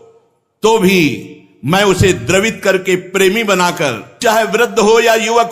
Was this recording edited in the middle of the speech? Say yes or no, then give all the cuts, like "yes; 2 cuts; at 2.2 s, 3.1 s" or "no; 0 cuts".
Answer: yes; 1 cut; at 4.2 s